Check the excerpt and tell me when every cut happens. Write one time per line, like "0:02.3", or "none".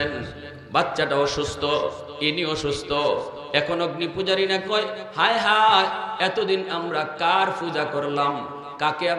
none